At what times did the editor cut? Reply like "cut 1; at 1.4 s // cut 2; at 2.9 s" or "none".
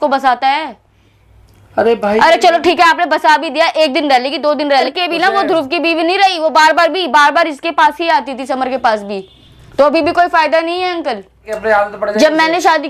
cut 1; at 4.9 s // cut 2; at 11.5 s